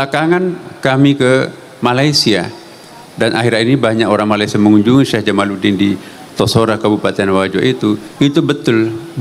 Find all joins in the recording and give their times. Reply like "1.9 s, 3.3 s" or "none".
none